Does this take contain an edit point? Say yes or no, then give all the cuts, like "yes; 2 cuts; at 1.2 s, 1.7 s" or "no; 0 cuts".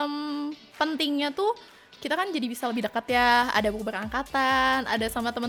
no; 0 cuts